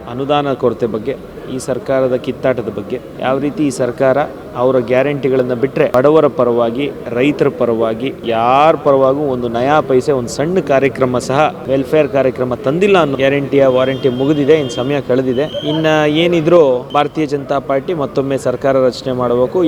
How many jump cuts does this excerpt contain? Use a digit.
7